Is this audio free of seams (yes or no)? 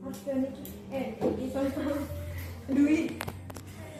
yes